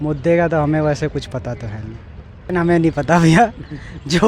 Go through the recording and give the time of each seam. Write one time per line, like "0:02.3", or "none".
0:02.4